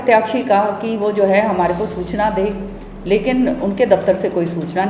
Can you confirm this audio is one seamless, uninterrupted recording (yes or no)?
yes